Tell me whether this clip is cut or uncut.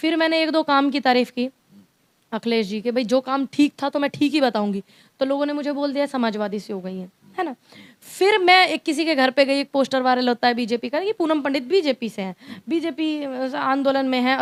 uncut